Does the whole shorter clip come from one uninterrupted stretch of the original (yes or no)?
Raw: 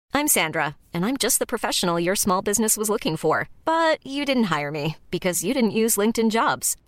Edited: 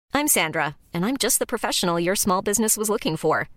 yes